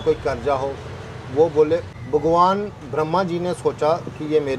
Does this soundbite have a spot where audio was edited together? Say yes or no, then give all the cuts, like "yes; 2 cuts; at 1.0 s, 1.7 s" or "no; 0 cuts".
yes; 1 cut; at 1.9 s